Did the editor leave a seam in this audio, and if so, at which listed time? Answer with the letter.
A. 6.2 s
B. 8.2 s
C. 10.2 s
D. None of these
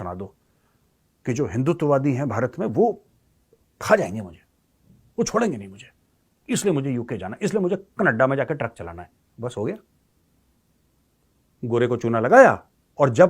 D